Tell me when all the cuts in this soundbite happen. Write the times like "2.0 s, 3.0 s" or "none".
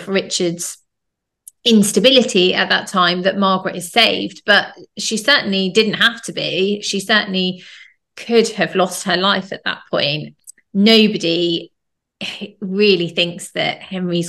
10.3 s